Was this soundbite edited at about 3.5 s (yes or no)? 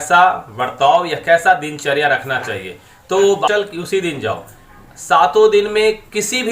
yes